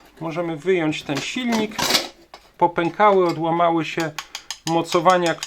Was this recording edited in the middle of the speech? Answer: yes; 1 cut; at 2.5 s

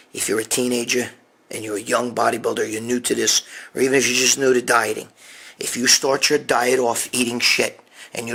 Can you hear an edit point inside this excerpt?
no; 0 cuts

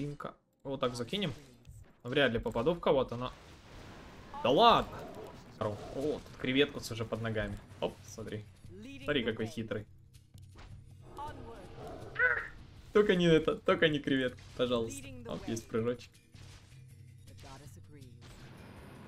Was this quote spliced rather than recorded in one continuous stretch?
yes; 1 cut; at 5.6 s

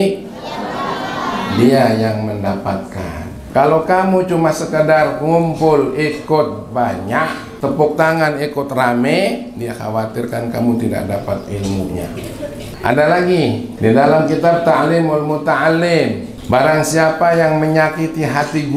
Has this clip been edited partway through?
yes; 5 cuts; at 3.3 s, 7.4 s, 12.7 s, 13.7 s, 16.3 s

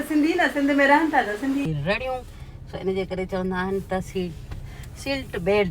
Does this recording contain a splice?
yes; 1 cut; at 1.7 s

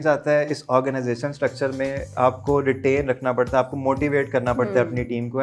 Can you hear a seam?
yes; 1 cut; at 2.1 s

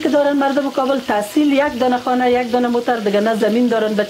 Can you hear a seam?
no; 0 cuts

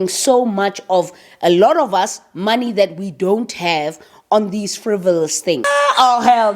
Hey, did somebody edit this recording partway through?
yes; 1 cut; at 5.6 s

